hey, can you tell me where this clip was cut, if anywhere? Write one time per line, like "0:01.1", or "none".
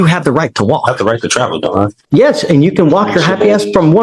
0:02.0